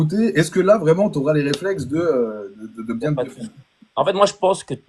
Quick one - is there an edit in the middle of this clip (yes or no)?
no